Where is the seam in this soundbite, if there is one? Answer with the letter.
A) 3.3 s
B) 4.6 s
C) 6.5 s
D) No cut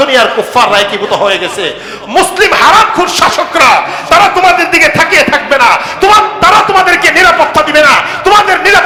D